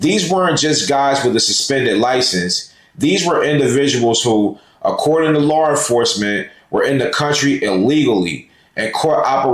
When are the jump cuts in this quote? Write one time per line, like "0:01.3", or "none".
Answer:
none